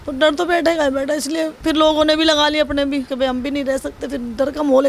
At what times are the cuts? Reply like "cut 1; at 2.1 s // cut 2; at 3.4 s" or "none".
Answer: cut 1; at 1.5 s // cut 2; at 3.1 s